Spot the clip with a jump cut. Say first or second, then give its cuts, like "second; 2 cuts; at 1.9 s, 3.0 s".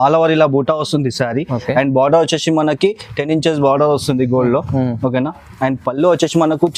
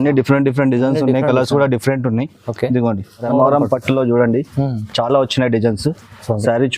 second; 1 cut; at 3.3 s